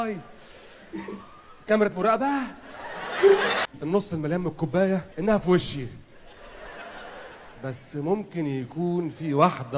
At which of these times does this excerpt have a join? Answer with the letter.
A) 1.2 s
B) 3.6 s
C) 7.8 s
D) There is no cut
B